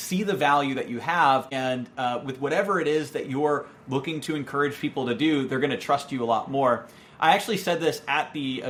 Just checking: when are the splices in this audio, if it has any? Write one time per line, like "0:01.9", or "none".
none

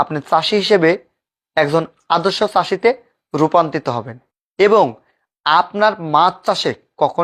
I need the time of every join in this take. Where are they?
none

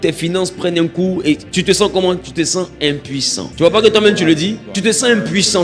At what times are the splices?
0:01.5
0:03.4
0:04.7

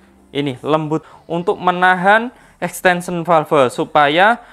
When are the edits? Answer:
0:01.0

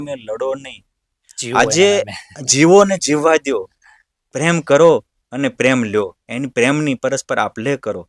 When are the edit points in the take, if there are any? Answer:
none

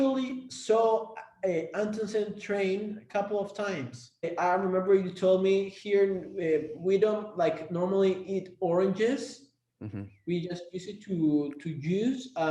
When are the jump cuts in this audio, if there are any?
0:04.3

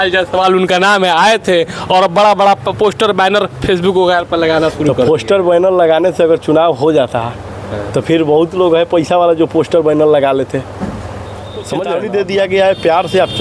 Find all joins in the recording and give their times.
0:11.8

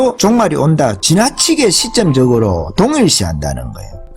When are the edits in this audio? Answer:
0:01.0

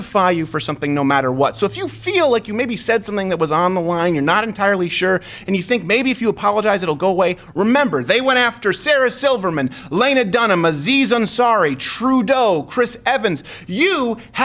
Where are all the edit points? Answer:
none

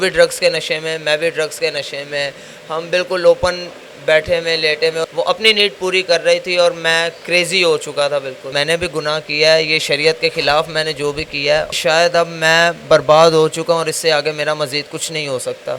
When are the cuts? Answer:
0:05.1
0:08.5
0:11.7

